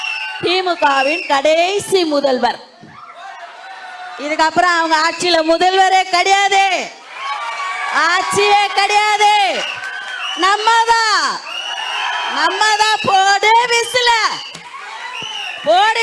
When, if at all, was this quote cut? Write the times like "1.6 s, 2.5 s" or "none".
none